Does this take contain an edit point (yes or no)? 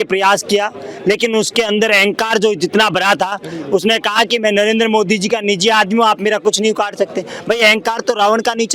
no